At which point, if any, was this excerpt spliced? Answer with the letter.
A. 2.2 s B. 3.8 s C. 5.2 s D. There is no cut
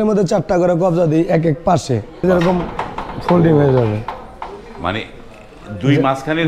A